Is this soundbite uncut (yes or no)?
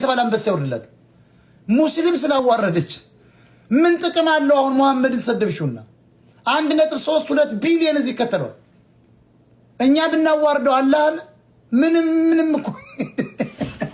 yes